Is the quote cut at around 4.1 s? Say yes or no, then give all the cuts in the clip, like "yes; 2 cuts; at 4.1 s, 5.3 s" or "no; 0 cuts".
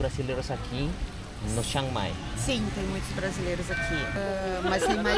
yes; 1 cut; at 4.1 s